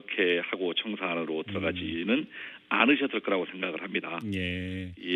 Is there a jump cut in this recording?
yes; 1 cut; at 2.2 s

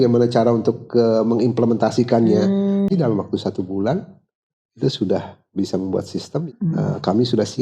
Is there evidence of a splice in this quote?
yes; 2 cuts; at 2.9 s, 6.3 s

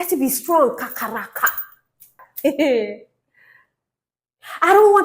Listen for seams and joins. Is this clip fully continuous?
no; 1 cut; at 2.2 s

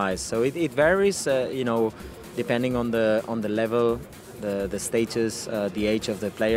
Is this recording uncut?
yes; 0 cuts

